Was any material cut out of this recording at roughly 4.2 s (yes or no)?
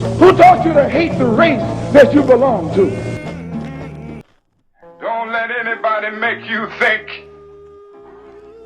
yes